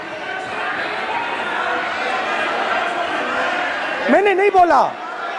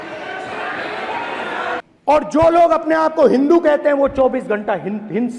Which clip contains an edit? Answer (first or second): second